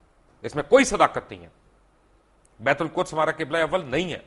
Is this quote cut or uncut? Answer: uncut